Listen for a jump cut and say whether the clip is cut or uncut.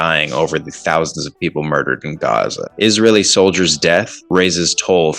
cut